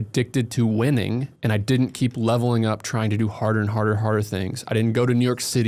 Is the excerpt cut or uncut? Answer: cut